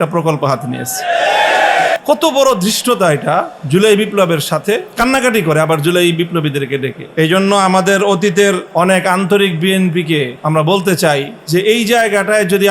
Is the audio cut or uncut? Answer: cut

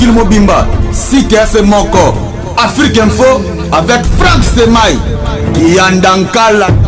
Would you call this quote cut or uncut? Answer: uncut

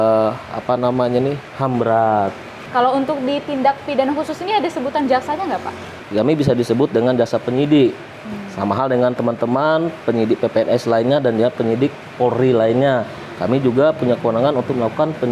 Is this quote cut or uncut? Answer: cut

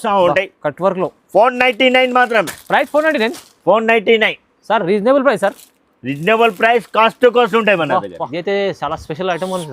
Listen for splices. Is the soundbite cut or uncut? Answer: cut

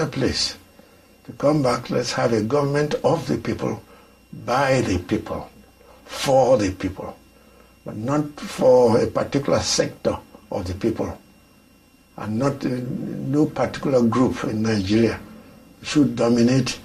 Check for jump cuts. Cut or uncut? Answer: uncut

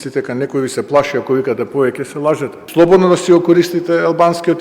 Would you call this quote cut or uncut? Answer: cut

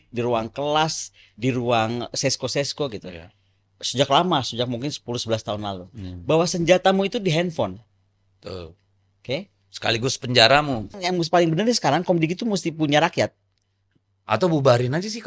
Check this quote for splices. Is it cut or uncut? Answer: cut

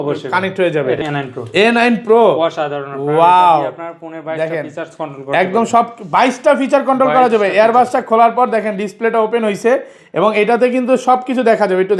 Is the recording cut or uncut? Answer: cut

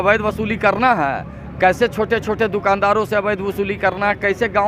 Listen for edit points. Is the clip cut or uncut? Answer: uncut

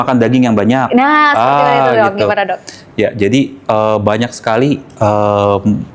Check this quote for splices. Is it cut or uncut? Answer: uncut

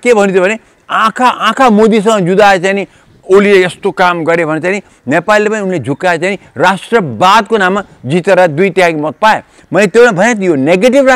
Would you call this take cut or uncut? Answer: uncut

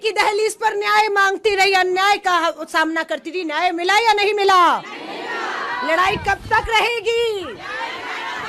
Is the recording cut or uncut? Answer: uncut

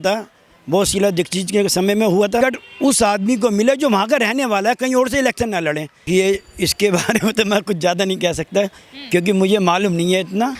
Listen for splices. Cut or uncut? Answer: cut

